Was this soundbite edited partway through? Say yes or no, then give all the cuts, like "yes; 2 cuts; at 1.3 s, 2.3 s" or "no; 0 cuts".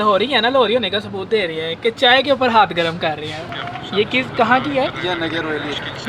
yes; 1 cut; at 3.4 s